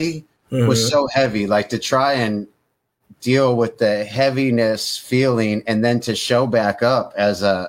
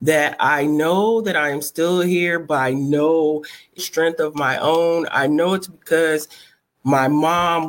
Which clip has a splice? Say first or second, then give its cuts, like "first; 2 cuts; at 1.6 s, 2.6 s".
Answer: second; 1 cut; at 3.8 s